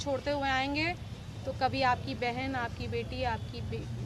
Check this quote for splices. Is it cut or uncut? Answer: uncut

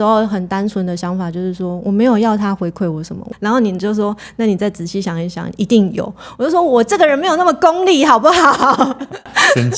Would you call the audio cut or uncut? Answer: uncut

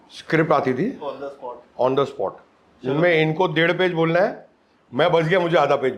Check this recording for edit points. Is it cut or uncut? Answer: uncut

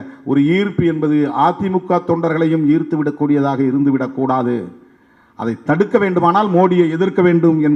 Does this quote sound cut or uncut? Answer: uncut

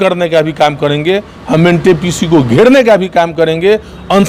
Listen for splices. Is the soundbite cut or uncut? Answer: uncut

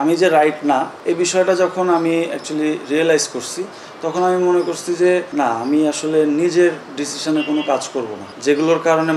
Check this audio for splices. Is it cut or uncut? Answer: cut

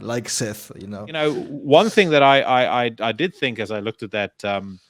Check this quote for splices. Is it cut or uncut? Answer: cut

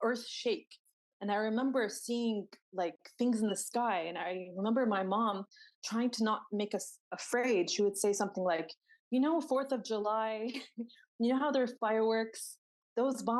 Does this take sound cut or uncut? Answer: uncut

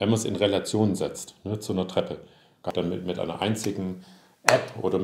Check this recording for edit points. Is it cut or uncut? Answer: cut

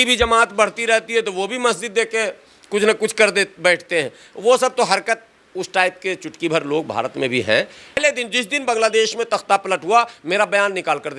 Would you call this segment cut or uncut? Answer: cut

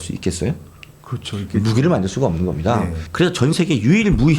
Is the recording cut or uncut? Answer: cut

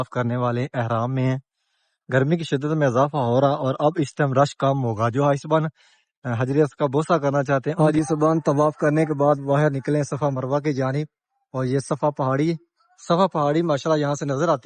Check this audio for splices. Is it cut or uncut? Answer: cut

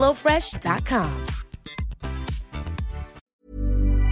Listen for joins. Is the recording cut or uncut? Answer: cut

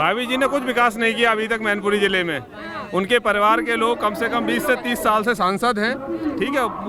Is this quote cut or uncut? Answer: uncut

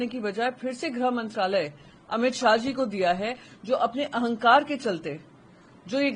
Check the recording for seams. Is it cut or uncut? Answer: uncut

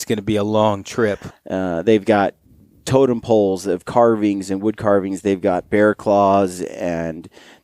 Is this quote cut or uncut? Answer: cut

